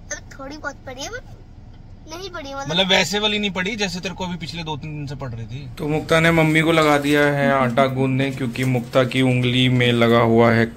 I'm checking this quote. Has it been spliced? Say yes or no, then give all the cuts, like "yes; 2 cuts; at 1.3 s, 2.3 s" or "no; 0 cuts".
yes; 1 cut; at 5.7 s